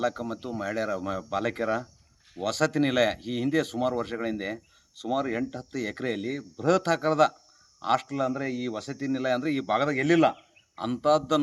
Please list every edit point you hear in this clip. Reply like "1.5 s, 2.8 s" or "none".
none